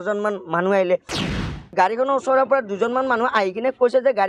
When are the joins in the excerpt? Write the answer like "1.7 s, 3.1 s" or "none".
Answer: 1.2 s